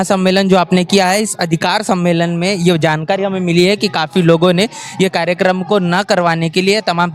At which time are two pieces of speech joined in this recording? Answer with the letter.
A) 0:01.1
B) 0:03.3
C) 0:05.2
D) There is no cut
D